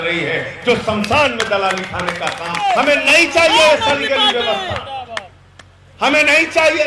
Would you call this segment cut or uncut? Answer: cut